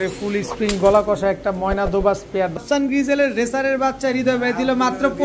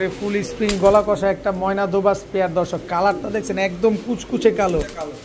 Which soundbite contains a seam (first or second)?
first